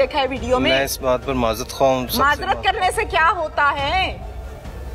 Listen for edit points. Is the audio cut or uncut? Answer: uncut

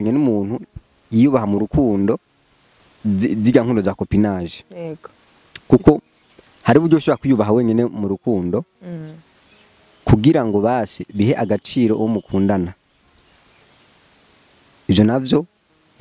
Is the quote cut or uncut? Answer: uncut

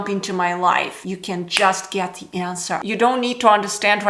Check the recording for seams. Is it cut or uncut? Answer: cut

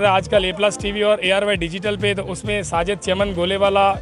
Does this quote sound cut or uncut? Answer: uncut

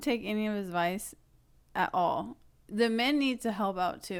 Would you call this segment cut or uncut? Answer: uncut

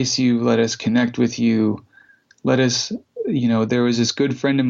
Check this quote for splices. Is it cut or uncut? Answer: uncut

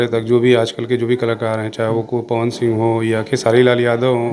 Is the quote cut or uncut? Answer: uncut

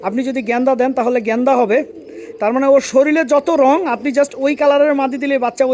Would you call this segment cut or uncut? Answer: uncut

